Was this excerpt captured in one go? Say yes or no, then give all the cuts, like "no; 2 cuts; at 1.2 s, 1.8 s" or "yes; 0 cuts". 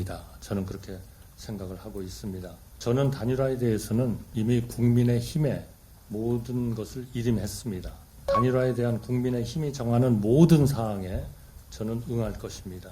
no; 3 cuts; at 2.6 s, 4.2 s, 8.3 s